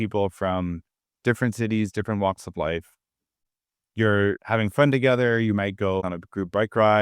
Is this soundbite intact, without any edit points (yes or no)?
no